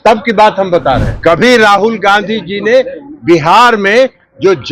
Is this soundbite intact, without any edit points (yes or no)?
no